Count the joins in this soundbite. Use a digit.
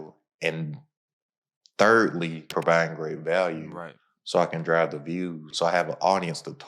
2